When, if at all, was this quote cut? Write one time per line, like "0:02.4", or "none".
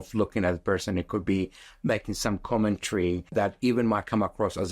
0:03.3